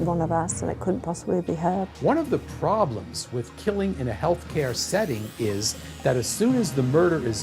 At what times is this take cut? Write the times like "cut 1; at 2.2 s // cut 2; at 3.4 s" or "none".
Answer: cut 1; at 1.9 s